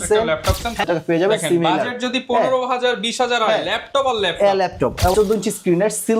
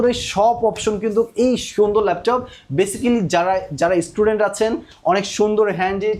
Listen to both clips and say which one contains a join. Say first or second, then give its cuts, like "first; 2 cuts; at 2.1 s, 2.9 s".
first; 2 cuts; at 0.8 s, 5.1 s